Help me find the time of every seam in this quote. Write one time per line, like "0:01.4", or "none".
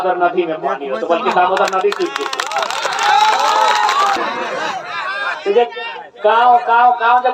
0:04.2